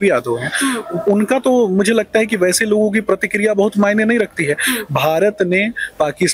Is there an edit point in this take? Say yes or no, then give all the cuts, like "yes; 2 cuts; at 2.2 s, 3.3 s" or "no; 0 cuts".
no; 0 cuts